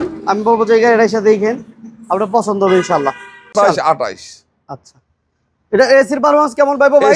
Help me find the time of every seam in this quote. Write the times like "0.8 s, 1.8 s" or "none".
3.5 s